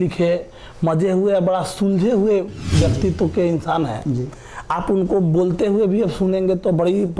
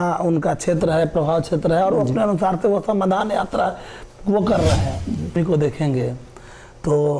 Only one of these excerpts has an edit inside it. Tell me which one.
second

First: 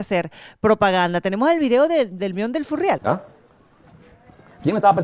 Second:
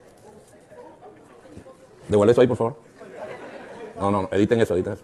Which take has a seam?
first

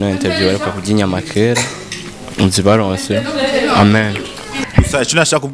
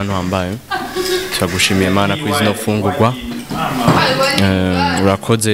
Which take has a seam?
first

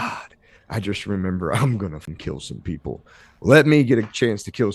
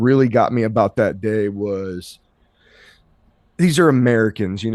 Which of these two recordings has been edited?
first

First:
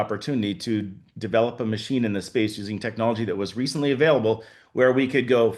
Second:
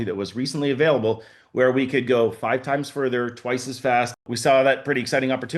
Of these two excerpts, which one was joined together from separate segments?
second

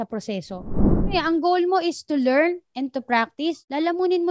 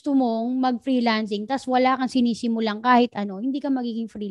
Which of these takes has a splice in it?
first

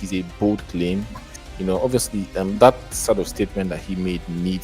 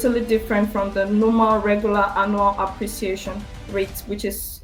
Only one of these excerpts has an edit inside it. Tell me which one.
first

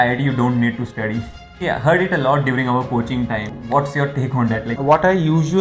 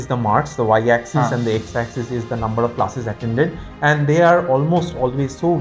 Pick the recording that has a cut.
first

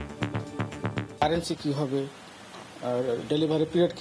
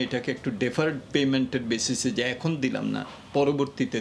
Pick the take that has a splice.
first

